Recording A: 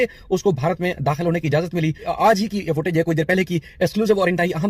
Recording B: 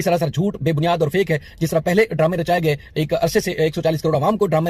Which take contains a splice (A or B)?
A